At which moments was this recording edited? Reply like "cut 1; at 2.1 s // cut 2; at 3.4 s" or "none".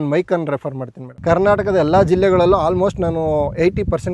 cut 1; at 1.2 s

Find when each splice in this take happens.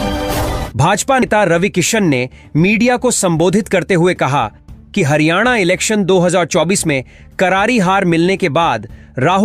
cut 1; at 1.2 s

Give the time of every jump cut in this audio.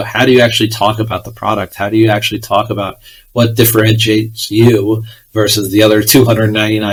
none

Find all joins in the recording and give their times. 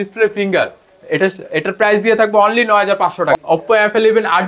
cut 1; at 3.3 s

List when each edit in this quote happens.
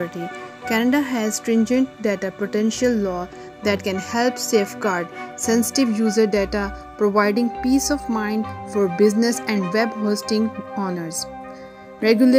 none

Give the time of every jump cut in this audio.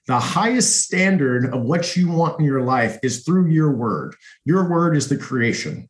none

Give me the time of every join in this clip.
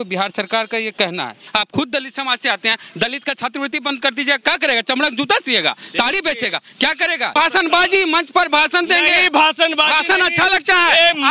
cut 1; at 1.4 s // cut 2; at 7.3 s

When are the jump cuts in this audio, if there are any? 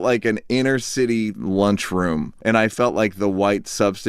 cut 1; at 1.4 s // cut 2; at 2.3 s

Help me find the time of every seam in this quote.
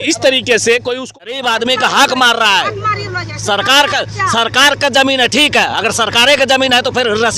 cut 1; at 1.0 s

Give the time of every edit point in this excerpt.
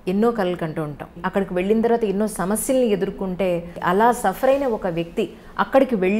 cut 1; at 1.2 s // cut 2; at 3.8 s

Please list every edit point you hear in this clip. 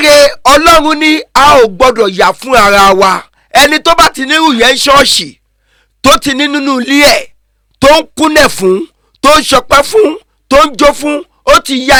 none

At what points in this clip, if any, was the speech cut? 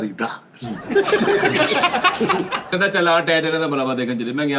cut 1; at 2.7 s

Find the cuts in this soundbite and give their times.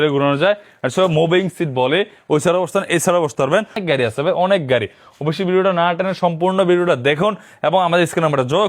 cut 1; at 3.8 s

